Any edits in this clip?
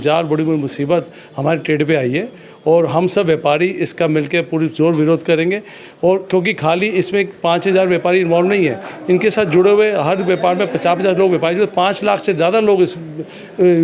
no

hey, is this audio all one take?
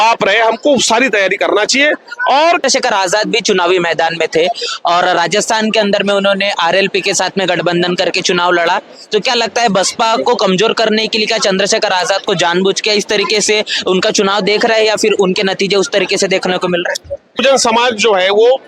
no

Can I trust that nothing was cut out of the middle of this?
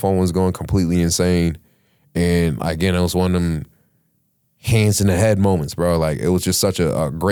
yes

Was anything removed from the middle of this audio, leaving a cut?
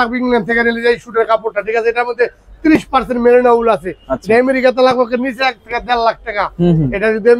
no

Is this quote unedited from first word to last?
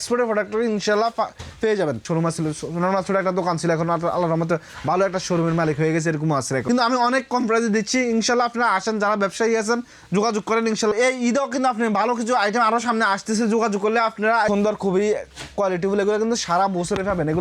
no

